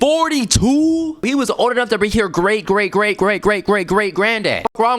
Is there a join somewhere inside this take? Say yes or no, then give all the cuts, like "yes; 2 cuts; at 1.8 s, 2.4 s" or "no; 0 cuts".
yes; 1 cut; at 1.2 s